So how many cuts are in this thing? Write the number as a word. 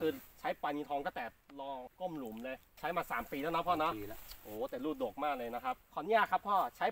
three